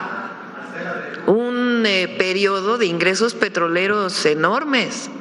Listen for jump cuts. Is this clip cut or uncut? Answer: uncut